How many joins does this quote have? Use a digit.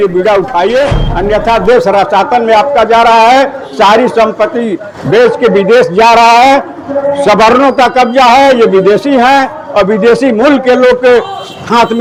0